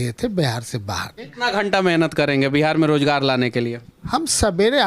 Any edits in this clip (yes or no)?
yes